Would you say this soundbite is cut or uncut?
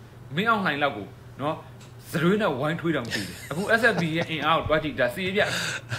uncut